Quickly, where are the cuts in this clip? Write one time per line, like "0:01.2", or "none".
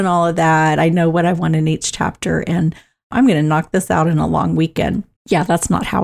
0:05.1